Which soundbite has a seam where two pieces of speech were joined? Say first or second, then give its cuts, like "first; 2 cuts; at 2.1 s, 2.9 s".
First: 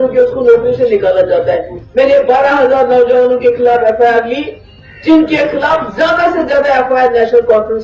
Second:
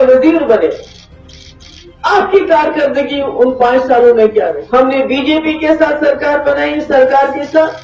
second; 1 cut; at 4.5 s